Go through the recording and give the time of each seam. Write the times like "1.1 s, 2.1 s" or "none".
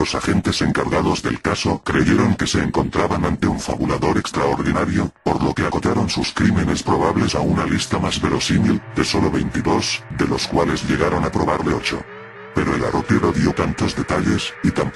13.9 s